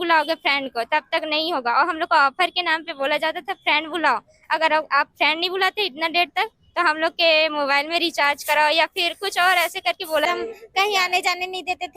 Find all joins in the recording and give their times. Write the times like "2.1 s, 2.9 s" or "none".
10.2 s